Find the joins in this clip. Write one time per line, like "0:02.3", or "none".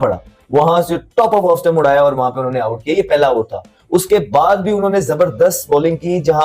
none